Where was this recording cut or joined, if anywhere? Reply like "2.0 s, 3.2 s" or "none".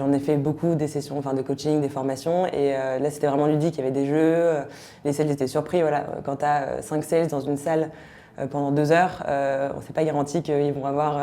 none